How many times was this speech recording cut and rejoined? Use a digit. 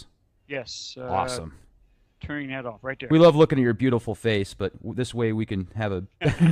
1